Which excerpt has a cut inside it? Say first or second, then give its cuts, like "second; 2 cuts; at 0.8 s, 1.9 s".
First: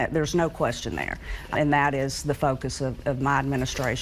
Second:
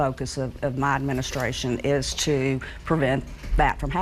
first; 1 cut; at 1.5 s